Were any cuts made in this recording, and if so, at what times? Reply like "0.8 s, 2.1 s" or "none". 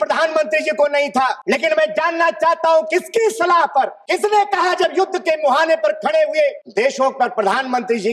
1.4 s, 4.0 s, 6.6 s